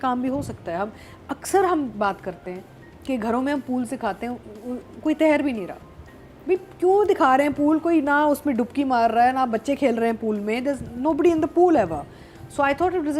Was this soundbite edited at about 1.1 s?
no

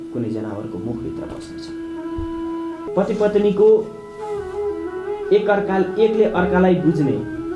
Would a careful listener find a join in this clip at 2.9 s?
yes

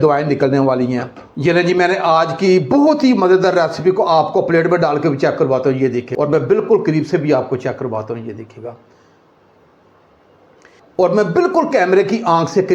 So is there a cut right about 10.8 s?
yes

